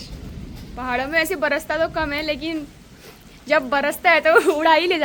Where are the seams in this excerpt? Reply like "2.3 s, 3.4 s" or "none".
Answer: none